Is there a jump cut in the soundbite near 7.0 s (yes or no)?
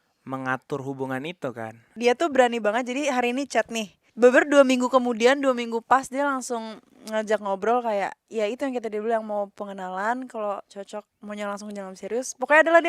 no